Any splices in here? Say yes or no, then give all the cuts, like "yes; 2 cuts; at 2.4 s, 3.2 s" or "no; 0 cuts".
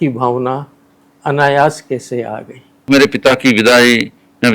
yes; 1 cut; at 2.9 s